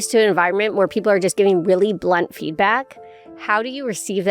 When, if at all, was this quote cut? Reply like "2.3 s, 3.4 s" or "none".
none